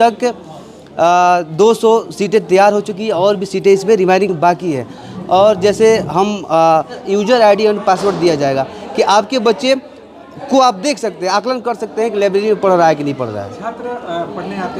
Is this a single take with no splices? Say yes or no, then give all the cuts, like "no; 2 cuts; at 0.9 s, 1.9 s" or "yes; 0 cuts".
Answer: no; 1 cut; at 7.0 s